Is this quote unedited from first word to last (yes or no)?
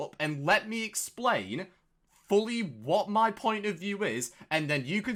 yes